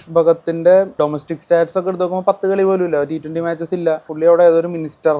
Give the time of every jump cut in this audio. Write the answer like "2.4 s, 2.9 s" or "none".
1.0 s, 4.1 s